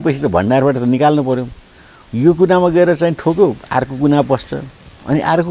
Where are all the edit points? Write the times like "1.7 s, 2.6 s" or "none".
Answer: none